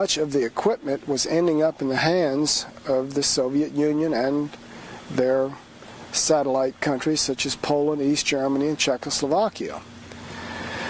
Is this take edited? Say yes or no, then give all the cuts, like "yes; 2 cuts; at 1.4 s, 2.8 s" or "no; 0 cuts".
no; 0 cuts